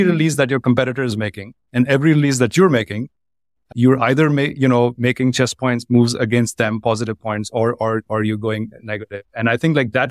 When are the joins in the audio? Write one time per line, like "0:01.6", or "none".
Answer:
none